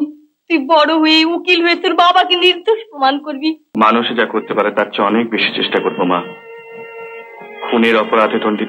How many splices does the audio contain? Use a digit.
1